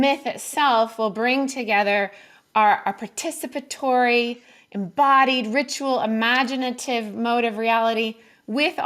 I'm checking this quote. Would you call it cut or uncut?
uncut